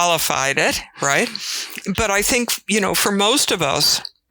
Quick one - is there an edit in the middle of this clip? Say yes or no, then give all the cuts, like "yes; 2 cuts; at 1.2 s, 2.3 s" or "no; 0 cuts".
yes; 1 cut; at 1.7 s